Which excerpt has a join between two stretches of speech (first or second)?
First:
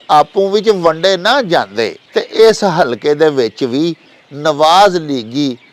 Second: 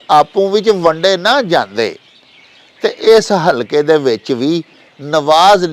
first